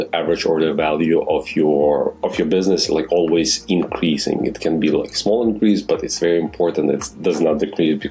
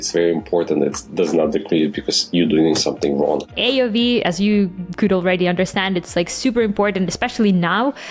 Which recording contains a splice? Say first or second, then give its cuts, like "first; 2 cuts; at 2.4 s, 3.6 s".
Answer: second; 1 cut; at 3.5 s